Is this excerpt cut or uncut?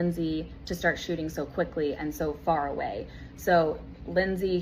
uncut